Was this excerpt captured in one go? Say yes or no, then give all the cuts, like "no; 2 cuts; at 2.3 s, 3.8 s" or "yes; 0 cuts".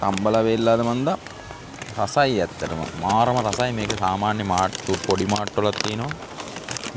yes; 0 cuts